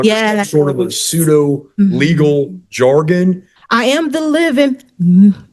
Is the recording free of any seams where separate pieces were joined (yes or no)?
no